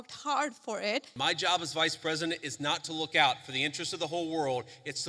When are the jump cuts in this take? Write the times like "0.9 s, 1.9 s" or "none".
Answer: 1.1 s